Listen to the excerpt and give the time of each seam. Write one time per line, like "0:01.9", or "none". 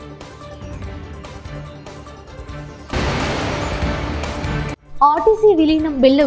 0:01.9